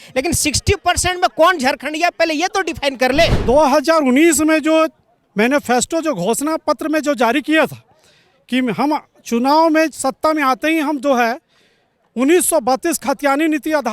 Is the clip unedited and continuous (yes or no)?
no